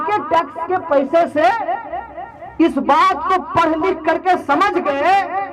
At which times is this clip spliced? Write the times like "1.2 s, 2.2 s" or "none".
none